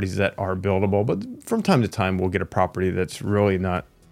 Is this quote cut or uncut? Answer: uncut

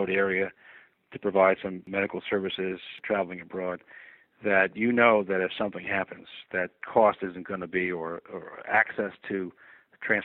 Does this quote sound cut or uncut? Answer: cut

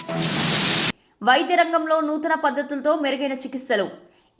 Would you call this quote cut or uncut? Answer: cut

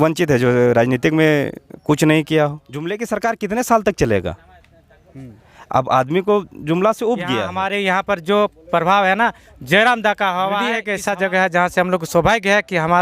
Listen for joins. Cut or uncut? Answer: cut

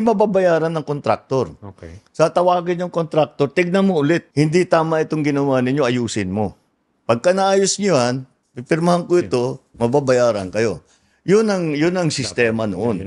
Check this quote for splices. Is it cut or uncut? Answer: uncut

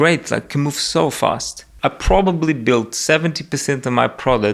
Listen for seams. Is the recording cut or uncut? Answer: cut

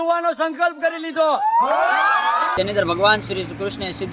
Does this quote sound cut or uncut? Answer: cut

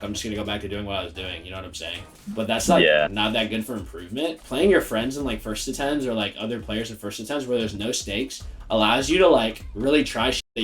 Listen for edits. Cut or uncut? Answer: cut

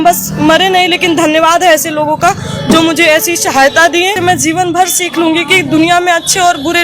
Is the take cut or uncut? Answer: cut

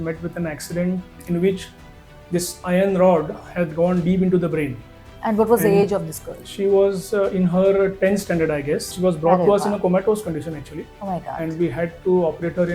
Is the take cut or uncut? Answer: cut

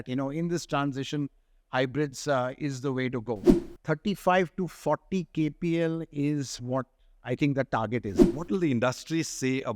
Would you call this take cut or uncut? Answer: cut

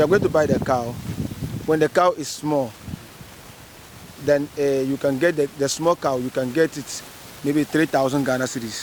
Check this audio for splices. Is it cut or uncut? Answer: uncut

